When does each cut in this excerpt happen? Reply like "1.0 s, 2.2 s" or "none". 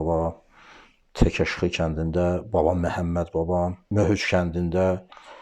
3.8 s